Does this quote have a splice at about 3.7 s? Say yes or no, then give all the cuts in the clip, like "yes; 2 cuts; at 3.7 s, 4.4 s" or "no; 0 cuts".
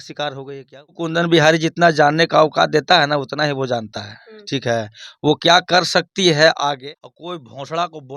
no; 2 cuts; at 1.0 s, 6.8 s